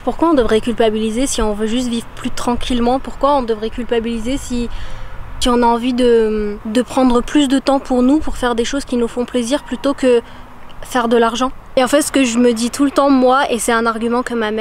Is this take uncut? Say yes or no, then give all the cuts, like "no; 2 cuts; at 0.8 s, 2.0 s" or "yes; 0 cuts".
yes; 0 cuts